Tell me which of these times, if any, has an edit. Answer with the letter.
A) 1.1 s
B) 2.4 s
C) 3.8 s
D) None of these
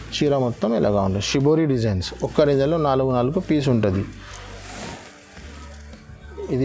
D